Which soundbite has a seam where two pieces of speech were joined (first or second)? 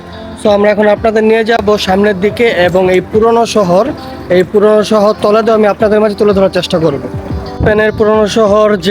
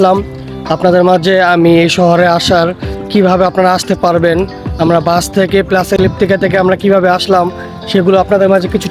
first